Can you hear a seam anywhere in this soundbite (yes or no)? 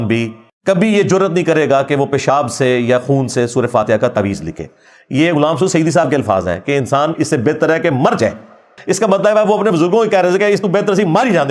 yes